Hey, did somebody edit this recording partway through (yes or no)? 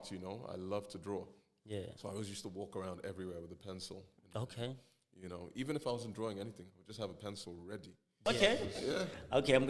yes